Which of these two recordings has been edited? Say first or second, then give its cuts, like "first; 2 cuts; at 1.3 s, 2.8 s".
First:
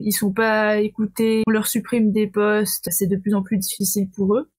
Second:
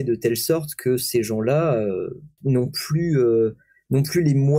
first; 2 cuts; at 1.4 s, 2.8 s